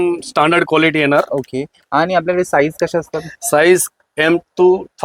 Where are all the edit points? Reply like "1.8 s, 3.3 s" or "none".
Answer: none